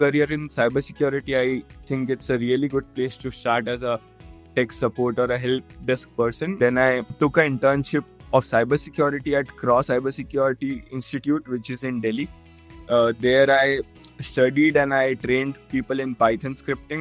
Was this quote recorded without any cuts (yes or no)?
no